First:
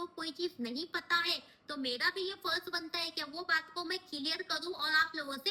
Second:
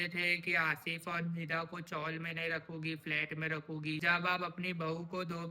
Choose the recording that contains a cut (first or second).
second